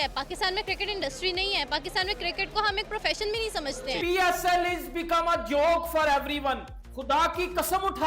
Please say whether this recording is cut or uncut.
cut